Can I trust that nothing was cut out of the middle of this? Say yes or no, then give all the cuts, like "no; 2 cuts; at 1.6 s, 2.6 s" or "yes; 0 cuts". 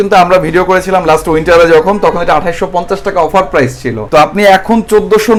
yes; 0 cuts